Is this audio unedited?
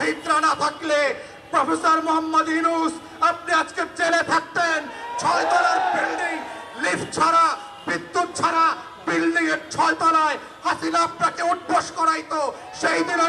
yes; 0 cuts

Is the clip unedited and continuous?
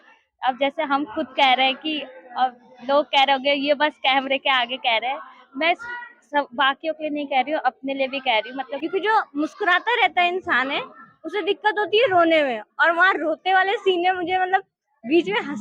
no; 1 cut; at 8.8 s

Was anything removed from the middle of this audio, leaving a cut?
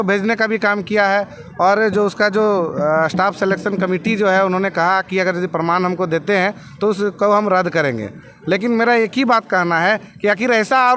no; 0 cuts

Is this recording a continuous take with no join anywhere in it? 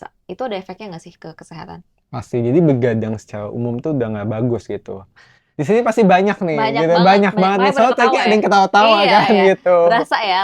yes; 0 cuts

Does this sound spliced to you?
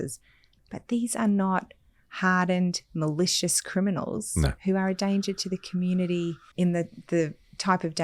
yes; 1 cut; at 6.4 s

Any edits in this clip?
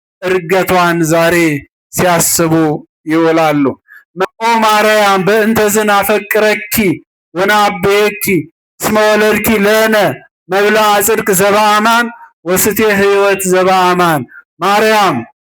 yes; 1 cut; at 4.1 s

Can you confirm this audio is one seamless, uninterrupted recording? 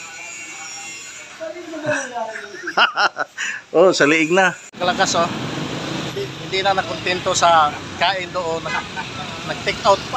no; 1 cut; at 4.7 s

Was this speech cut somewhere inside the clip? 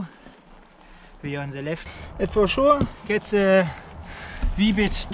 yes; 1 cut; at 1.8 s

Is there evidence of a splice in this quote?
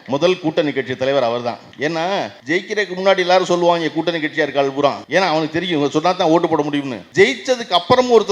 yes; 4 cuts; at 1.7 s, 2.4 s, 5.0 s, 7.0 s

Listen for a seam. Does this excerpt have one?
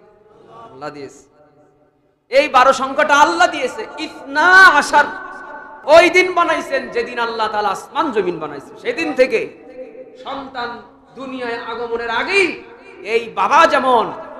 yes; 1 cut; at 5.7 s

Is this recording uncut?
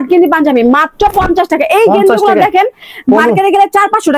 yes; 0 cuts

